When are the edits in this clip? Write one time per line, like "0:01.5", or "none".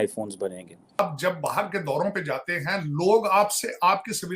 0:01.0